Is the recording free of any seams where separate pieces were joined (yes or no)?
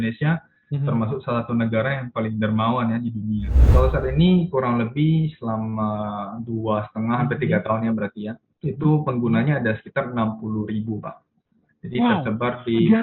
no